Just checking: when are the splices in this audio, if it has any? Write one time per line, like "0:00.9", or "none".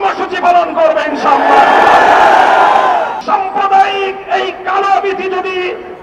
0:03.2